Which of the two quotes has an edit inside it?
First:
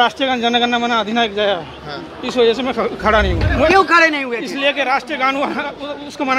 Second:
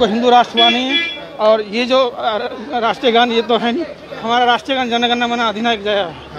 first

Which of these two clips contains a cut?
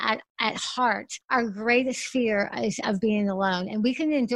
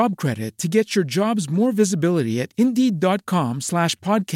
first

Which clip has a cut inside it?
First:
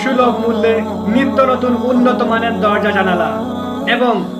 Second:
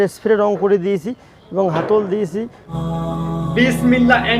second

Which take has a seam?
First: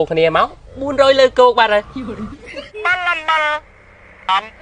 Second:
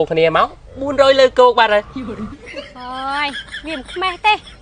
first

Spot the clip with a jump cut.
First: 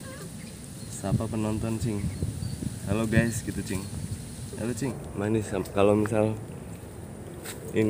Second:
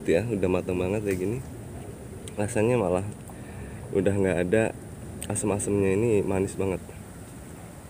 first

